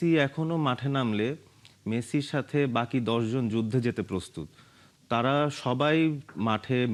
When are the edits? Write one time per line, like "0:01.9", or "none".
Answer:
none